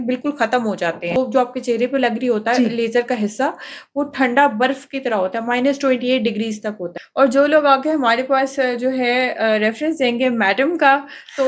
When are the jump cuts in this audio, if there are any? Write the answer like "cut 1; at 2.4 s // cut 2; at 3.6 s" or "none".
cut 1; at 1.2 s // cut 2; at 7.0 s